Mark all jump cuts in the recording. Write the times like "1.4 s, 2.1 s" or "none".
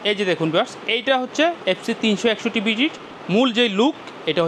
3.1 s